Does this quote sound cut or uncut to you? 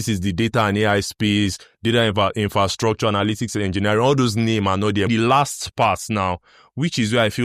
cut